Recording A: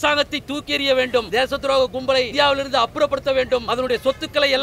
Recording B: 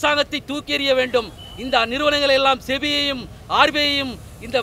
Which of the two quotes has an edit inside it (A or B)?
A